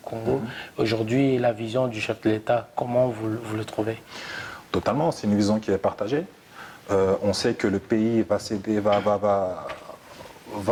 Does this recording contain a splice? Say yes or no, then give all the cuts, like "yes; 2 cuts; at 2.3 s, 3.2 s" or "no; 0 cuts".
no; 0 cuts